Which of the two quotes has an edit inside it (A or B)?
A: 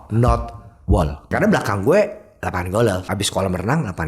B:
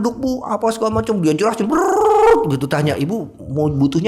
A